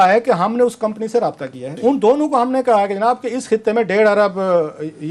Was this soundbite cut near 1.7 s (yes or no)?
yes